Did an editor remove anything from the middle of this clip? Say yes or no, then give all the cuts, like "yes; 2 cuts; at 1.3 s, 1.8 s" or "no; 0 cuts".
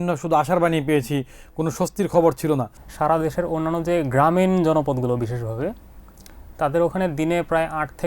yes; 1 cut; at 2.8 s